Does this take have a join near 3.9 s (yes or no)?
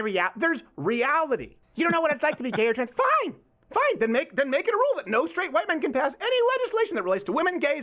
no